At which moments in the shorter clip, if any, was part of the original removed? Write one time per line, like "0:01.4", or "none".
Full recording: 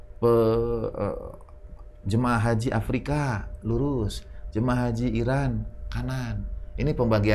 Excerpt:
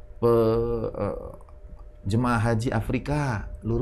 none